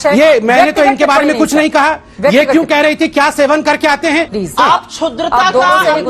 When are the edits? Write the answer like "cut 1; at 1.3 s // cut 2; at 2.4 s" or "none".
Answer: cut 1; at 4.3 s